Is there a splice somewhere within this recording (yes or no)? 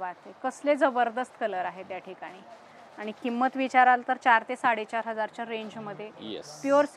no